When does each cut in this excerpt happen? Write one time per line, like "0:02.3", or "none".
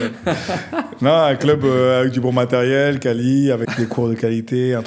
0:03.7